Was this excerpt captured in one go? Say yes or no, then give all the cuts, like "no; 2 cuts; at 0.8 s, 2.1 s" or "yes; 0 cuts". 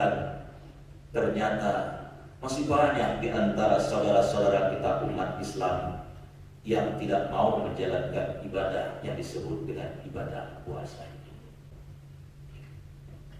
no; 1 cut; at 11.7 s